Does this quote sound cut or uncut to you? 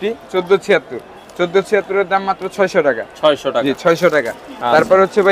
uncut